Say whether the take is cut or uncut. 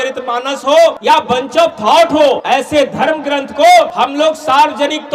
cut